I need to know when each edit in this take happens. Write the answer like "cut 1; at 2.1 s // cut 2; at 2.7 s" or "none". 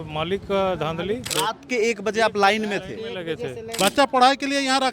cut 1; at 1.3 s // cut 2; at 3.6 s

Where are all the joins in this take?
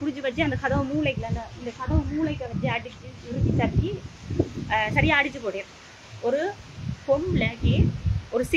none

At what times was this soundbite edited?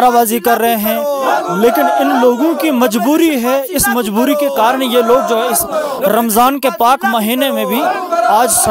none

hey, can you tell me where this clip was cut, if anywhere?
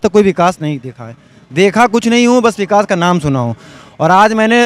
none

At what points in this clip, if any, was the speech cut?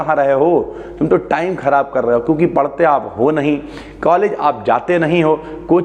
none

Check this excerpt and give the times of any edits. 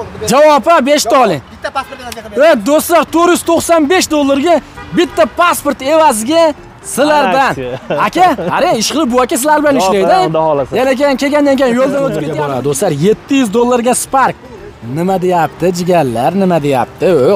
cut 1; at 12.3 s

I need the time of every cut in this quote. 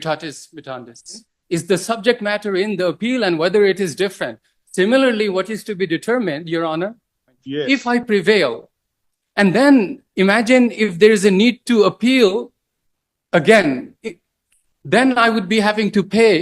cut 1; at 1.3 s // cut 2; at 7.4 s

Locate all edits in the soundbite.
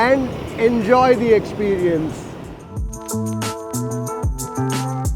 cut 1; at 2.8 s

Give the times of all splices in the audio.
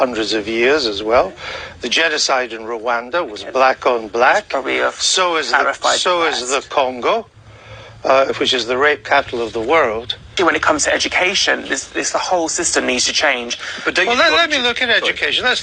cut 1; at 12.5 s

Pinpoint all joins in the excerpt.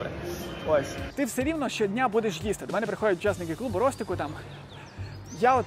cut 1; at 1.0 s

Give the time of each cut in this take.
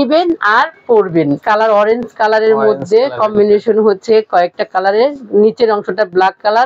cut 1; at 1.4 s

